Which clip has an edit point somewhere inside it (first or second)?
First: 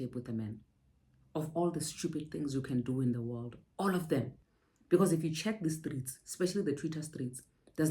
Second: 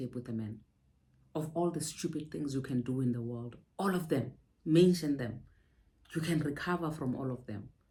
first